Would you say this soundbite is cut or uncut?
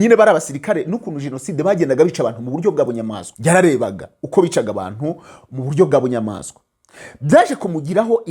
cut